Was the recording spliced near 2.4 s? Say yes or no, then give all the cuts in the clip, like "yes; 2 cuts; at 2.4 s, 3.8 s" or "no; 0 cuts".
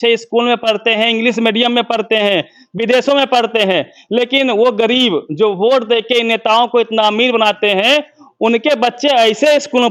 no; 0 cuts